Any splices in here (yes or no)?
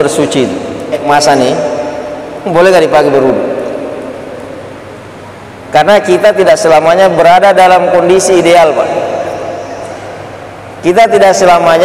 yes